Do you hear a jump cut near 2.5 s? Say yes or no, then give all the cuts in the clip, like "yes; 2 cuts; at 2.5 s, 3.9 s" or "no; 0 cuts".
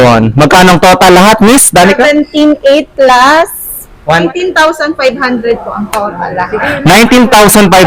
no; 1 cut; at 4.3 s